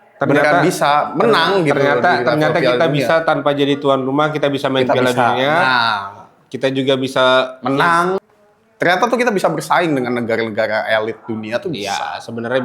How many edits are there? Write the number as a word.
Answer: one